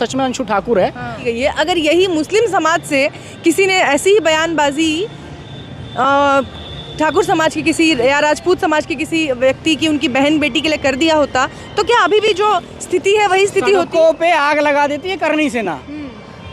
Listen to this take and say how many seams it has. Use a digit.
1